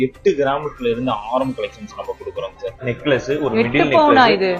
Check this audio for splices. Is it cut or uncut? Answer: cut